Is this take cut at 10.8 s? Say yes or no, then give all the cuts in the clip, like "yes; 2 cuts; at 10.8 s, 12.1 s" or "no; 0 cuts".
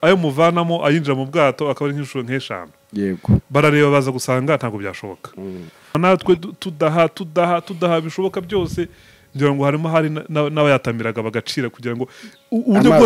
no; 1 cut; at 6.0 s